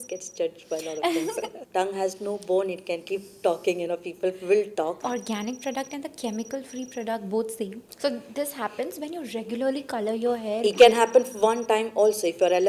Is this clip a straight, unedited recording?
no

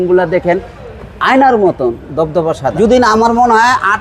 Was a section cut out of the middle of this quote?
yes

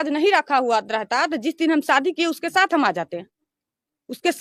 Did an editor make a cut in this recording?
no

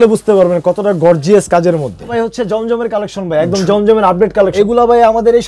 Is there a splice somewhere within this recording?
yes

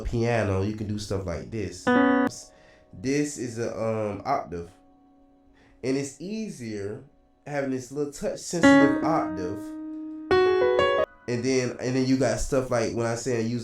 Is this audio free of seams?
no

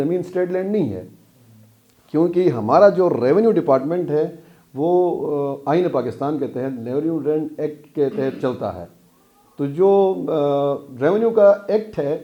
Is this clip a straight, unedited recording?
yes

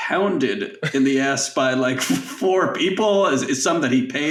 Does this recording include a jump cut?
no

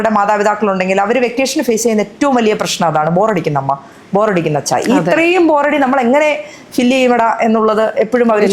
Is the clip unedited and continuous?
yes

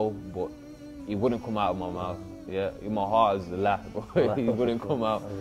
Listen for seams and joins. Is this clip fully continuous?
yes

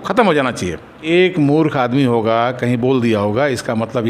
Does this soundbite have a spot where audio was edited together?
no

